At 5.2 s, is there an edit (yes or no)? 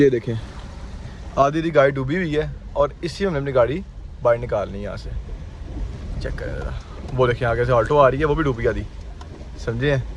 no